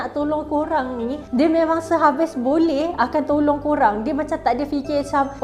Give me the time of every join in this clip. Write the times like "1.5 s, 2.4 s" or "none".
none